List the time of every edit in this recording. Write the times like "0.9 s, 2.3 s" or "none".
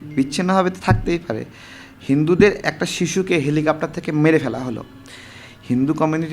none

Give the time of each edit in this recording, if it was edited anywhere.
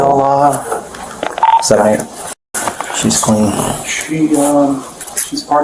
1.3 s

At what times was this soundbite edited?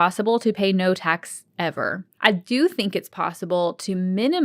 2.1 s

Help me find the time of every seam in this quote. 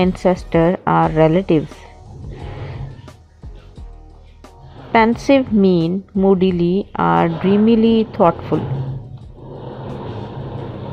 none

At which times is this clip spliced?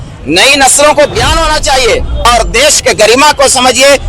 2.2 s

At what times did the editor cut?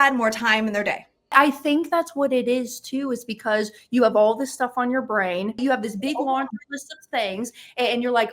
1.3 s, 5.6 s

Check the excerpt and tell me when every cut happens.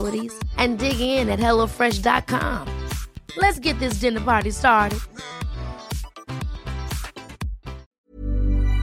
7.8 s

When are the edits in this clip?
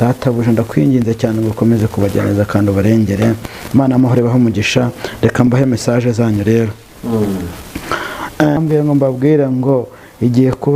8.6 s

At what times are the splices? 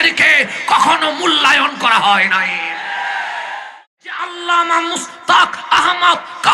3.7 s

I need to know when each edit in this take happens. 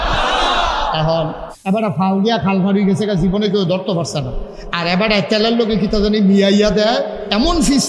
1.5 s

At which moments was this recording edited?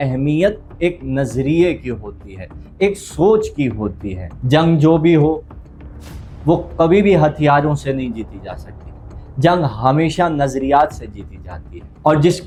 none

